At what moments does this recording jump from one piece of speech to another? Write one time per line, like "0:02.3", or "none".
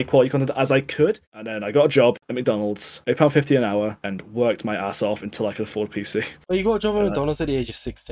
0:01.2